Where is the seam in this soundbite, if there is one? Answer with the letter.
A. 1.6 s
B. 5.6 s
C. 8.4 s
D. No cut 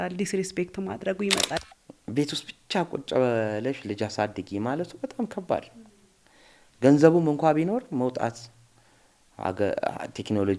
A